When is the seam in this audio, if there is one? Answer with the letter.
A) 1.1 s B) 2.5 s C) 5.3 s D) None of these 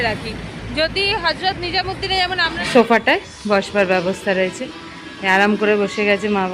B